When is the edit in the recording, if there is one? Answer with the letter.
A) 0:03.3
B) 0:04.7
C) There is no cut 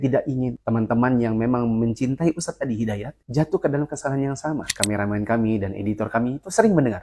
B